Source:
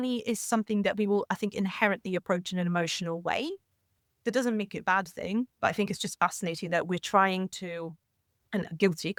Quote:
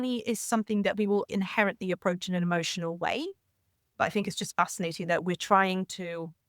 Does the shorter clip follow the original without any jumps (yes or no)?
no